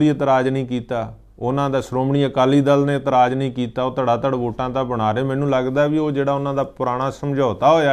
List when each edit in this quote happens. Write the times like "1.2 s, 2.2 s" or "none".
none

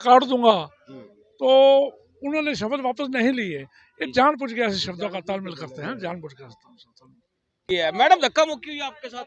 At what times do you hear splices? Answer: 7.6 s

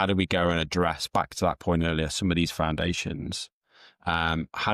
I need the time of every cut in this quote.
none

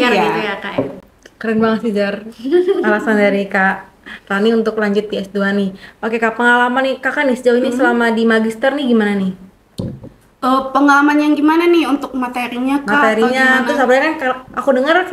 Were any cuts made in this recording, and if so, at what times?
none

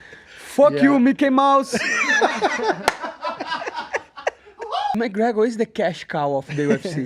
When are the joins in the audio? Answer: 4.9 s

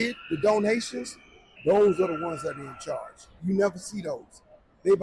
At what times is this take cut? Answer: 1.6 s, 3.4 s

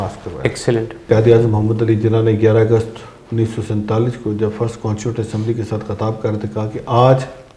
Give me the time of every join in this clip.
1.1 s

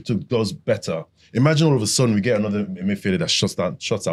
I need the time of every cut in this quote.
none

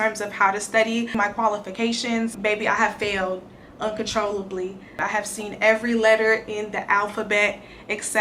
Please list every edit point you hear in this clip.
1.2 s, 2.4 s, 5.0 s

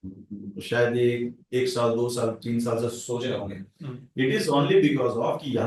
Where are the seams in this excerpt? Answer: none

